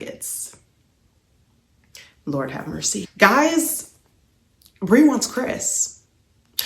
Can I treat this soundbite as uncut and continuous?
no; 1 cut; at 3.1 s

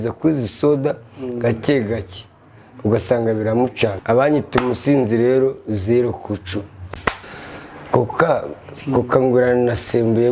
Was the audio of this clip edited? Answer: yes; 2 cuts; at 4.0 s, 7.3 s

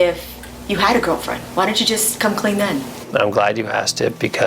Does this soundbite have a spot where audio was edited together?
yes; 1 cut; at 3.0 s

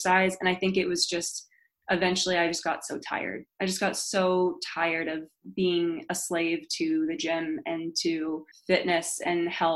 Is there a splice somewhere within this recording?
yes; 1 cut; at 8.5 s

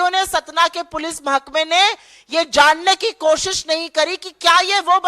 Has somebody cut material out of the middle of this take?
no; 0 cuts

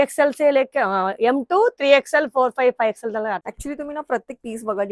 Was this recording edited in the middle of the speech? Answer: yes; 1 cut; at 3.5 s

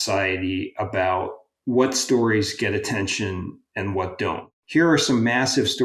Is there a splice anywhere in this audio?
yes; 3 cuts; at 1.4 s, 3.6 s, 4.5 s

